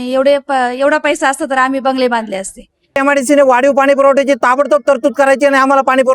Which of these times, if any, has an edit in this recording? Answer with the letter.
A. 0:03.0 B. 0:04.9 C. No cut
A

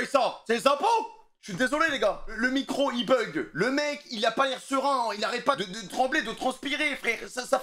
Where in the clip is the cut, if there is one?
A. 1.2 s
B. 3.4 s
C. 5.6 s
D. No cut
C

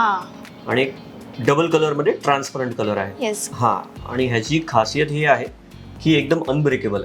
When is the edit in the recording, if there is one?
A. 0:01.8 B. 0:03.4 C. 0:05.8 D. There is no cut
B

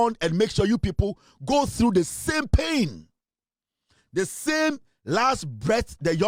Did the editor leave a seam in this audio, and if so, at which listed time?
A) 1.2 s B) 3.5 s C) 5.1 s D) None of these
D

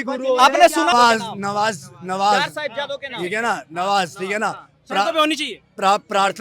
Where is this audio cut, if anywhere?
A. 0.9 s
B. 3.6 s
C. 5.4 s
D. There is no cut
A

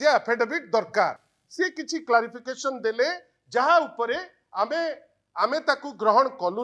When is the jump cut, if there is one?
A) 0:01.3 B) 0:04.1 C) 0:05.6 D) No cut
D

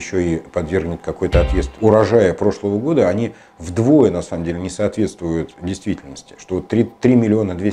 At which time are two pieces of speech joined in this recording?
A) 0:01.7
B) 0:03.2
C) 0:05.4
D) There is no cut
A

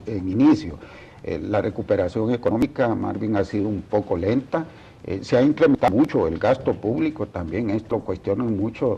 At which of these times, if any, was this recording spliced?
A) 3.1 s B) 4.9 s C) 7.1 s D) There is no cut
A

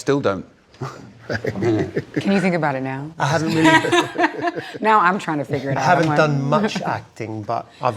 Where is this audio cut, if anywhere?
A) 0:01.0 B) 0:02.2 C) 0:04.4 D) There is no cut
B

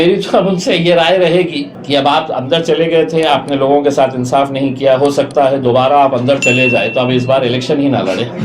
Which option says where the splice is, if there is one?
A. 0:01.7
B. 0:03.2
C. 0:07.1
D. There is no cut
A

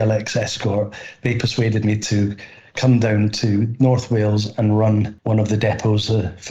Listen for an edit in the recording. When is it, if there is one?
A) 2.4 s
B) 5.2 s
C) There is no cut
B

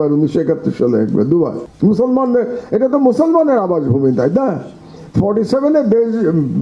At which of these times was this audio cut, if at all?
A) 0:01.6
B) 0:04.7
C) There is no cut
A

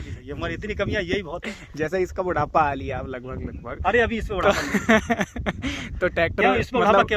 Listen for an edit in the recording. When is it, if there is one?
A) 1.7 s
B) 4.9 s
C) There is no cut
C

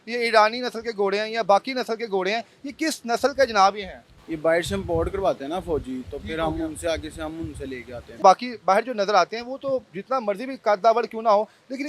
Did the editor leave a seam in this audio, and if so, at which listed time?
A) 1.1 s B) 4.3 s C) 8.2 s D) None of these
C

